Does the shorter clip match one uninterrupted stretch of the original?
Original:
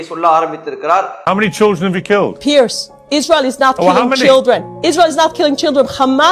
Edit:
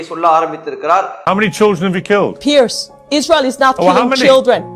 yes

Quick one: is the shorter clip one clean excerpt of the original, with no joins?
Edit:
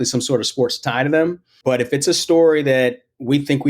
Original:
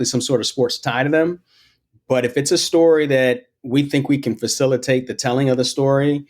no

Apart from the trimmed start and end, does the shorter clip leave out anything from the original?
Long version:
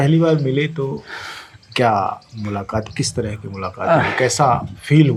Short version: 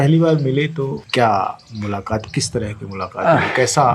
yes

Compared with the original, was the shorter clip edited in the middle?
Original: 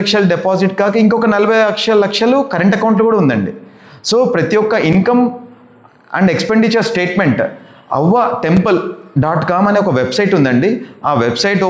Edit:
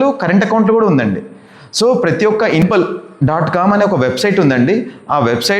yes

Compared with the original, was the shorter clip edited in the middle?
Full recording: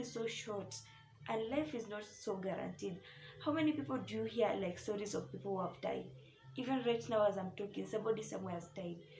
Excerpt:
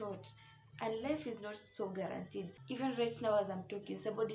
yes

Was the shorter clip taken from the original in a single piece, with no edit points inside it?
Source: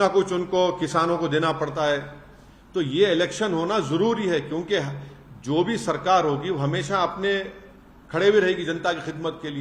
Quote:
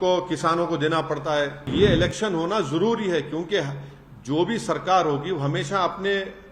no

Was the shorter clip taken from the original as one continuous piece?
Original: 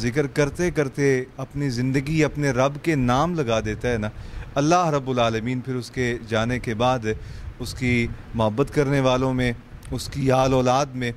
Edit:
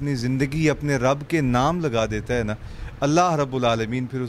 yes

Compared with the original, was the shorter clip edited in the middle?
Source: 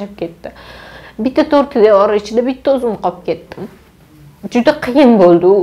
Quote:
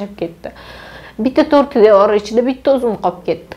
no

